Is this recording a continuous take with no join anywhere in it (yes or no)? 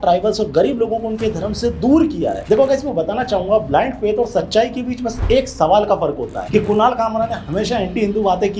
no